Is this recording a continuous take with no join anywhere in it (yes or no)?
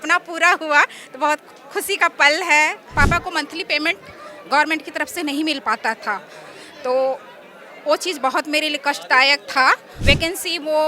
no